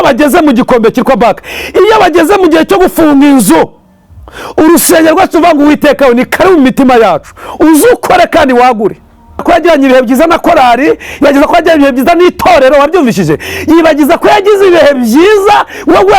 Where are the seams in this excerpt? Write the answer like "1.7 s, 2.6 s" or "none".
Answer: 9.4 s

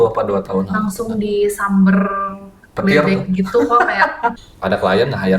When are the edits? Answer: 4.4 s

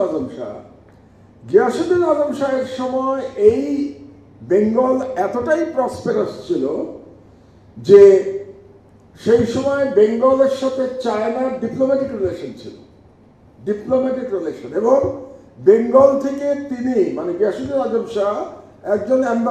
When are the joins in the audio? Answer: none

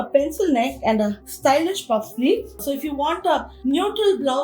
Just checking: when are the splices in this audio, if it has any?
2.6 s

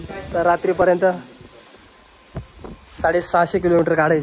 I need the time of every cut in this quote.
none

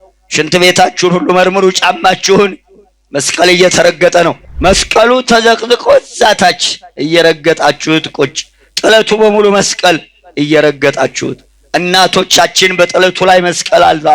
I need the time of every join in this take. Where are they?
4.4 s

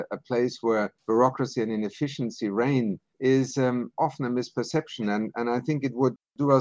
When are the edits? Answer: 1.0 s, 3.1 s

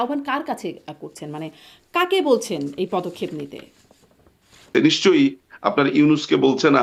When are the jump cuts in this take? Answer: none

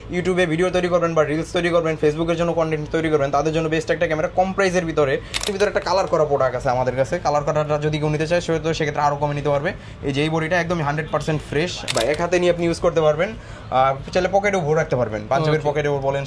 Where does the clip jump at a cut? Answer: 5.5 s, 11.9 s

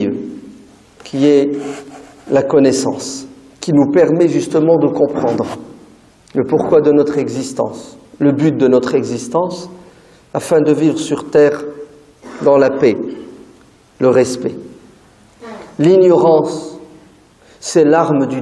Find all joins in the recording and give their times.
none

